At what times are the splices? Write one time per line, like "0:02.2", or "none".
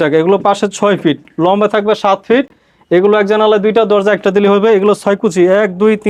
none